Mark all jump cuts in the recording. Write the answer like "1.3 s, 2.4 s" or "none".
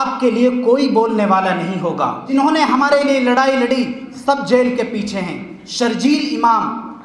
2.3 s